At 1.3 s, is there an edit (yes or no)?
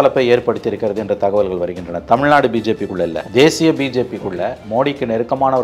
no